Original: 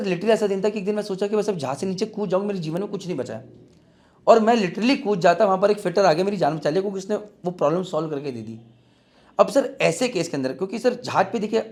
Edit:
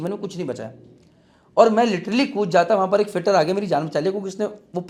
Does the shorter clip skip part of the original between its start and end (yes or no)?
no